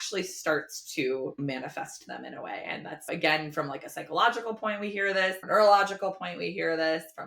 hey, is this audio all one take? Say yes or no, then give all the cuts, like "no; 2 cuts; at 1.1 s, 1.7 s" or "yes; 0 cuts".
no; 2 cuts; at 1.4 s, 3.1 s